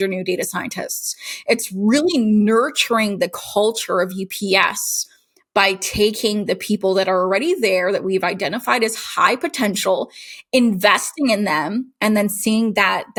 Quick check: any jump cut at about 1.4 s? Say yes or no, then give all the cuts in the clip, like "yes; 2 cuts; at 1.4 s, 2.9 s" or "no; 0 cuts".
no; 0 cuts